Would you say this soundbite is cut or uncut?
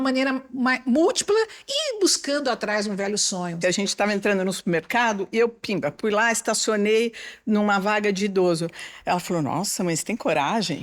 cut